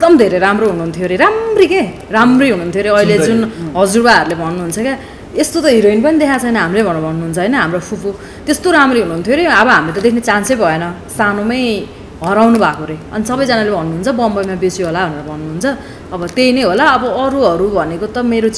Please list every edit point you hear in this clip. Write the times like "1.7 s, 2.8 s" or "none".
none